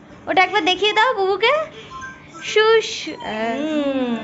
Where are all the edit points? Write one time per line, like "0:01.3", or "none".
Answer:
0:03.3